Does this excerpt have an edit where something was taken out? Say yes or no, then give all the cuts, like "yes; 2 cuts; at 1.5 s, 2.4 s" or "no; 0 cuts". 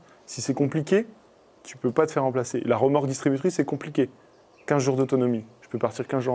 no; 0 cuts